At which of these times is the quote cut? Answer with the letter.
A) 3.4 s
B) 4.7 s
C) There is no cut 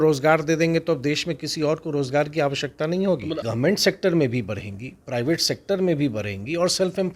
A